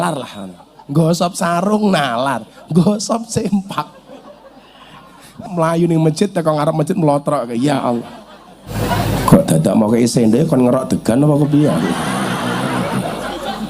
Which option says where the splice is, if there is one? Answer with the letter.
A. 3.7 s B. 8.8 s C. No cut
B